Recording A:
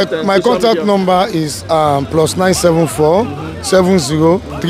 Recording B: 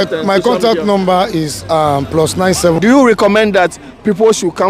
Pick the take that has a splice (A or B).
B